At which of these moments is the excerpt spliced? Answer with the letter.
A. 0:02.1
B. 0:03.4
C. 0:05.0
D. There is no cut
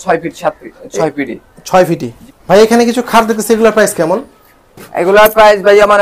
D